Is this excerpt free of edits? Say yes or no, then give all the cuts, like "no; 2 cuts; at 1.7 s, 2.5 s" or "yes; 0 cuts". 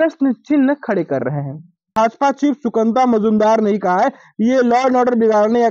no; 1 cut; at 1.9 s